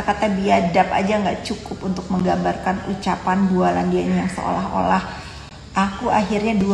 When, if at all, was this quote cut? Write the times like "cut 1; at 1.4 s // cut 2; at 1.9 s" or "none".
none